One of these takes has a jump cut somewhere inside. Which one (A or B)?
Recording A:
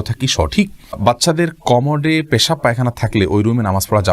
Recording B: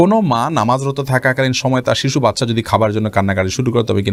A